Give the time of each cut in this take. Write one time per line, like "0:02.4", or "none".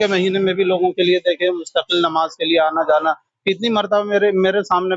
none